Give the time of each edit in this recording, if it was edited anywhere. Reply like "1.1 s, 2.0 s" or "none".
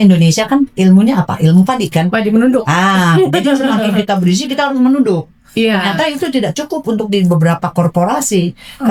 none